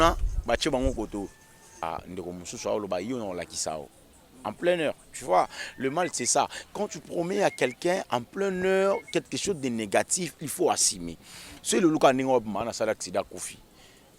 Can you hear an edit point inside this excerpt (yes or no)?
yes